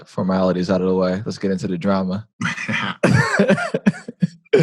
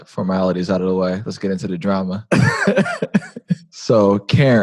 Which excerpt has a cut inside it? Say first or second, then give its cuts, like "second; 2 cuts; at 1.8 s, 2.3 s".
second; 2 cuts; at 2.2 s, 3.6 s